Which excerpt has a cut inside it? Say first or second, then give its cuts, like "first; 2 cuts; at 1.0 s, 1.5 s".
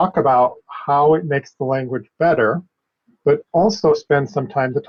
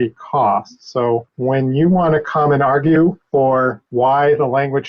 second; 2 cuts; at 1.3 s, 3.6 s